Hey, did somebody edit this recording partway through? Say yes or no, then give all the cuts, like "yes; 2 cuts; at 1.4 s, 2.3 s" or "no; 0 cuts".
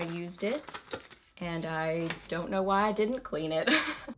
no; 0 cuts